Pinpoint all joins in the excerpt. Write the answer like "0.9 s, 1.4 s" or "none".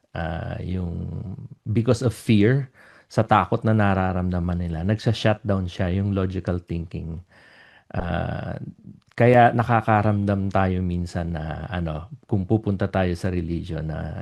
none

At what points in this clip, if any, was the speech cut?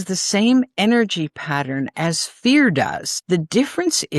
3.1 s

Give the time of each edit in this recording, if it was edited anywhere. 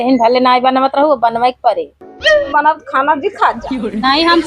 2.4 s

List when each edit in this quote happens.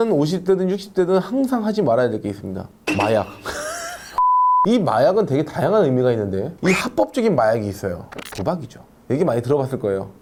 none

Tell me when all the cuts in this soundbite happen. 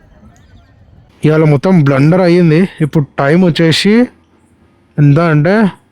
1.1 s

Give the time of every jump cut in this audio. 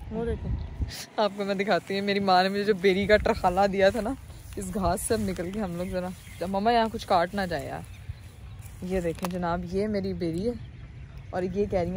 none

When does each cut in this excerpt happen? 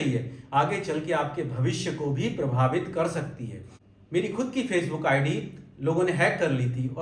3.9 s

